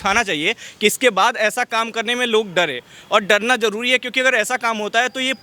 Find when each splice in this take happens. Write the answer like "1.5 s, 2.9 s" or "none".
none

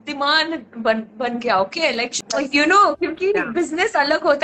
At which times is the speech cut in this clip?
2.1 s

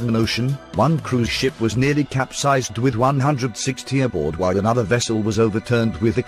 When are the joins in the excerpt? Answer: none

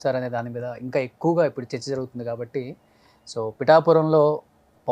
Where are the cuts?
none

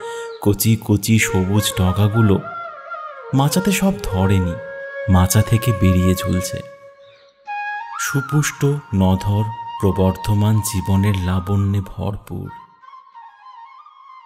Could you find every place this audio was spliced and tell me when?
12.5 s

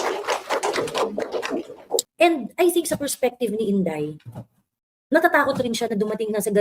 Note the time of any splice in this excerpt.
2.1 s

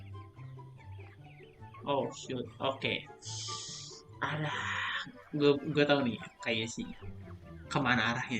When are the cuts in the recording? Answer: 1.8 s

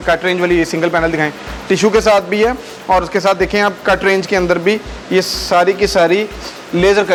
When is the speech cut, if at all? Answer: none

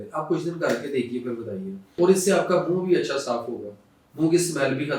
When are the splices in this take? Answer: 1.9 s

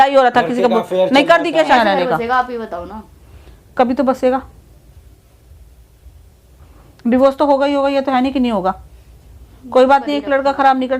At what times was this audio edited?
1.8 s

